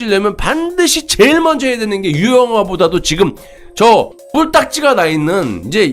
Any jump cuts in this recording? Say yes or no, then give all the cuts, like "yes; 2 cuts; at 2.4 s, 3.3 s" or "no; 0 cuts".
no; 0 cuts